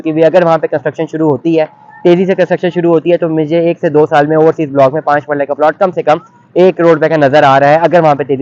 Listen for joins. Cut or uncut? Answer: uncut